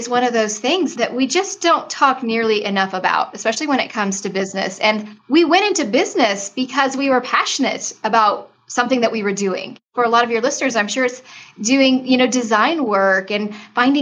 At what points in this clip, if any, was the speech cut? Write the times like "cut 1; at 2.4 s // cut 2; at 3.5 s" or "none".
cut 1; at 0.9 s // cut 2; at 5.1 s // cut 3; at 9.9 s